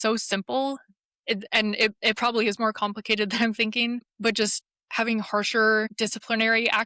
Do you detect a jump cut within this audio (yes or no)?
yes